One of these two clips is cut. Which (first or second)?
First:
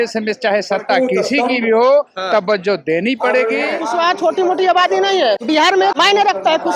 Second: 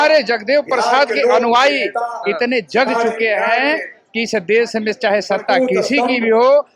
first